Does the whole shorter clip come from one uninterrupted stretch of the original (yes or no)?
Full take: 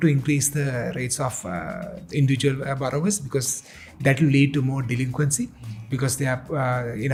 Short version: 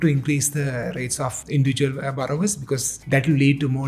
no